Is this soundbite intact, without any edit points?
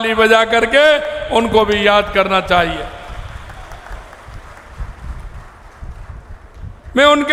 yes; 0 cuts

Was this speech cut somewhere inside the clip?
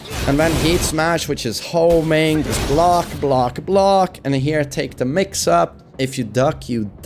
no; 0 cuts

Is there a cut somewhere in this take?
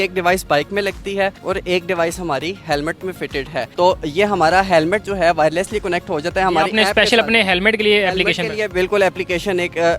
no; 0 cuts

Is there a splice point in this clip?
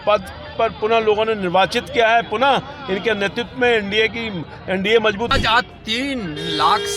yes; 1 cut; at 5.3 s

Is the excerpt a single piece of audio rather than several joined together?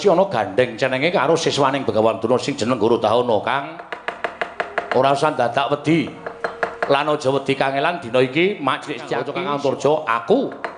no; 1 cut; at 9.2 s

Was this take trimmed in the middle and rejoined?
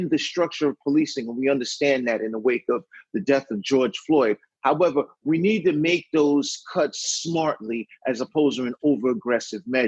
no; 0 cuts

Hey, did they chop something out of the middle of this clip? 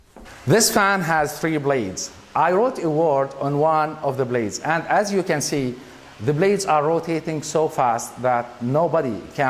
no; 0 cuts

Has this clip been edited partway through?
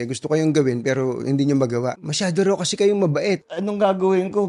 yes; 2 cuts; at 2.0 s, 3.5 s

